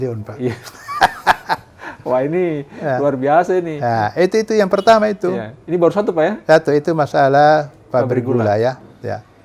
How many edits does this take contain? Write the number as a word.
zero